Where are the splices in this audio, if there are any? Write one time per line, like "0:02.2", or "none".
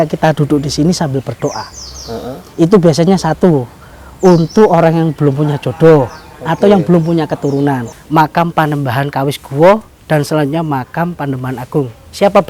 0:07.9